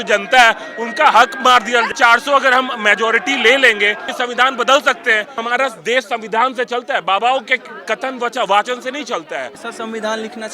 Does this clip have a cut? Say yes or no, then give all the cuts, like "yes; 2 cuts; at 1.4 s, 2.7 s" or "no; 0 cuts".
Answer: yes; 4 cuts; at 1.9 s, 4.1 s, 5.4 s, 9.6 s